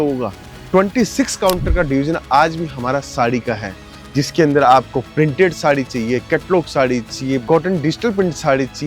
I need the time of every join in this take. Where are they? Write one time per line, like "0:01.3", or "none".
0:07.4